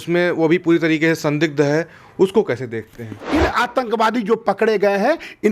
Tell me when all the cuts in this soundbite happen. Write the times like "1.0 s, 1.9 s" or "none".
3.2 s